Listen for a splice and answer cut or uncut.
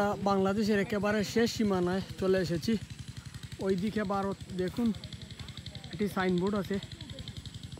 uncut